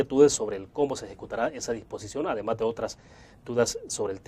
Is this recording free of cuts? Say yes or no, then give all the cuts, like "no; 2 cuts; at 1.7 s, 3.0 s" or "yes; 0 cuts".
yes; 0 cuts